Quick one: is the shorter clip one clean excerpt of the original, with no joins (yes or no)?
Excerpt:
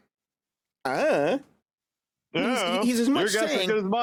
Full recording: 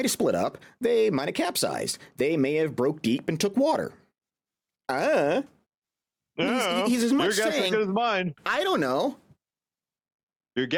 yes